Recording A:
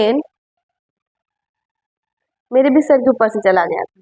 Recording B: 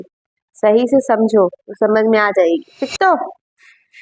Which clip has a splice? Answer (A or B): B